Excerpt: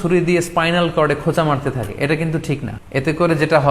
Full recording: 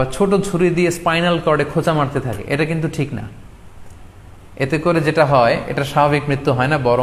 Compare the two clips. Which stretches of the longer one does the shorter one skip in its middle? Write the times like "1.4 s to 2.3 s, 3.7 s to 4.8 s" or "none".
3.2 s to 4.4 s